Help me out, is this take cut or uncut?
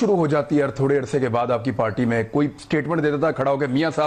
uncut